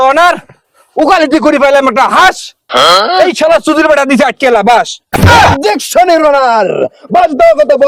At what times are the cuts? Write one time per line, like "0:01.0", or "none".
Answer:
none